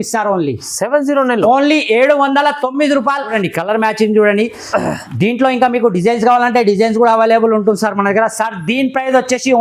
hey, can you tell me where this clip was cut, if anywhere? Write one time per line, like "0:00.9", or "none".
0:03.3